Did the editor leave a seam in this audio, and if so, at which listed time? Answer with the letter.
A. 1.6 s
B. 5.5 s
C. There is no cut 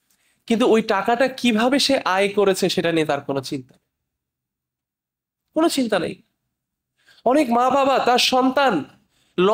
C